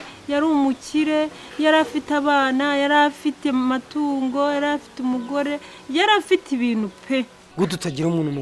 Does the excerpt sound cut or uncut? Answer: cut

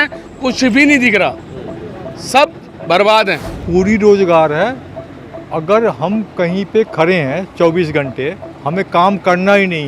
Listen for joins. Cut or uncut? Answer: cut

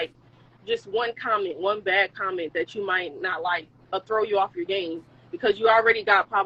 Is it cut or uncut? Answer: uncut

